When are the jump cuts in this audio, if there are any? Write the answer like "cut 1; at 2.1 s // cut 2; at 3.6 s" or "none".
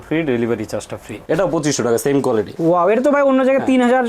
cut 1; at 1.2 s // cut 2; at 2.5 s